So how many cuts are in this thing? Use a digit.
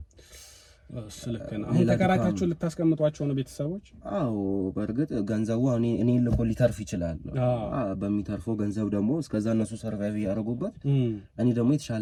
0